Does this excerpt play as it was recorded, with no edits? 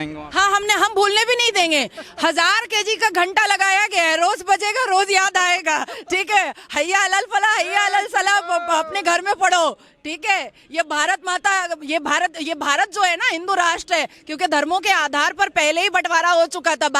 yes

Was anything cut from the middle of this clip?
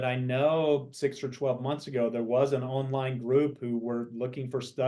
no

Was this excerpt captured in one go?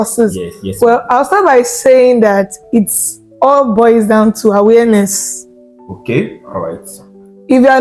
yes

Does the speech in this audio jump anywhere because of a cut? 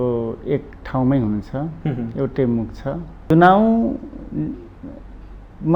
yes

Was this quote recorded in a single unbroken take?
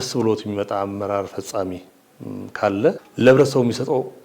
no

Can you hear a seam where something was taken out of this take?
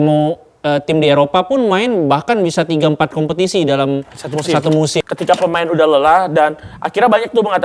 yes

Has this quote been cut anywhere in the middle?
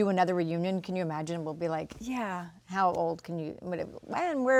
no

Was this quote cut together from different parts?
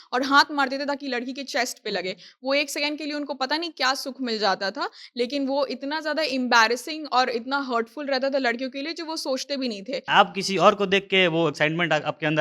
yes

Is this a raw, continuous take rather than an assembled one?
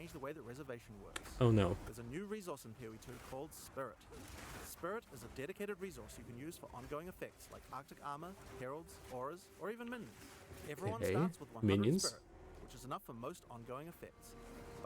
yes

